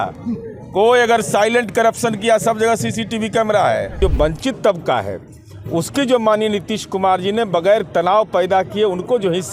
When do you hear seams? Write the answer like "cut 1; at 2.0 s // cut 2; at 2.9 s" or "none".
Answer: cut 1; at 4.0 s